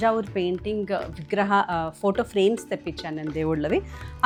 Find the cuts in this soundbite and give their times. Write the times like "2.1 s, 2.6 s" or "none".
none